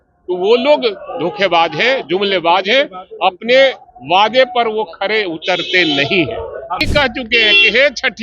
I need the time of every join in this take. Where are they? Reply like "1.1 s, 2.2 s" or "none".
6.8 s